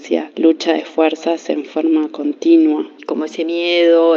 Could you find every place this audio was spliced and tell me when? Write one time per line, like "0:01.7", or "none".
0:03.0